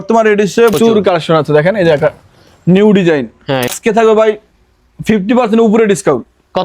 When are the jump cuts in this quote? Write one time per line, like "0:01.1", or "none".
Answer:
0:00.7
0:03.7